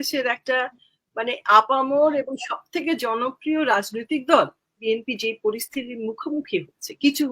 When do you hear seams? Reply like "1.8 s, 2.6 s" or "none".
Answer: 4.8 s